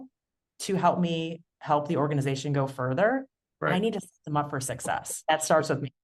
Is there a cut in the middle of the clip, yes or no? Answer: yes